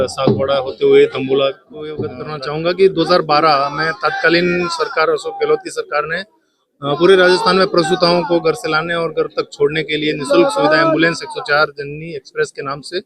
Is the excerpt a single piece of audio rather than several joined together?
no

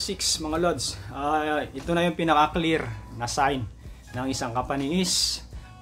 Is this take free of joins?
yes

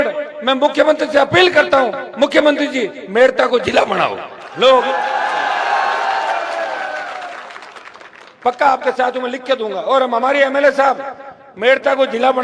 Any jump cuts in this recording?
no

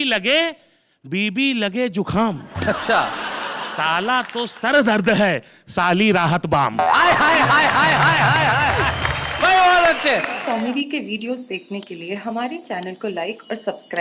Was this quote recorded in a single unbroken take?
no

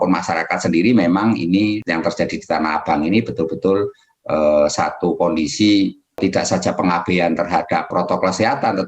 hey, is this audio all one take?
no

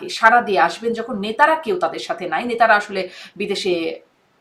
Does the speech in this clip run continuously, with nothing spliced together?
yes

